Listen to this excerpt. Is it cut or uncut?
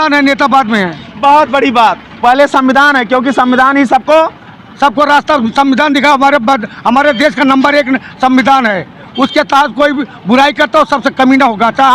uncut